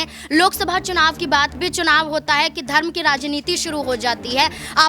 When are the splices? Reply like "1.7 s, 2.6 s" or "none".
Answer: 1.5 s